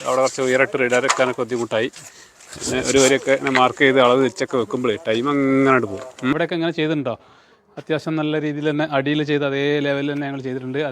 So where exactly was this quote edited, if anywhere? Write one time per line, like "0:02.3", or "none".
0:06.4